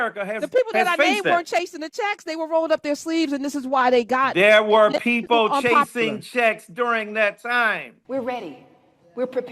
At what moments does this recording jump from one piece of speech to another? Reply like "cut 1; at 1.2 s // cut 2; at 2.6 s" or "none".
cut 1; at 7.9 s